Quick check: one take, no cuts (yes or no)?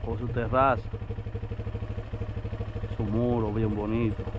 yes